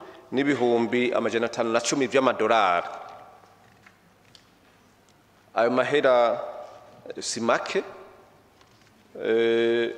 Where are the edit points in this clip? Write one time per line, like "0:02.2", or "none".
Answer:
none